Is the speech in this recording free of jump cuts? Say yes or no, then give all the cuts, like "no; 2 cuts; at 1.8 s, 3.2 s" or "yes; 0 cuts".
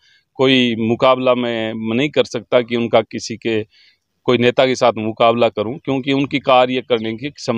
yes; 0 cuts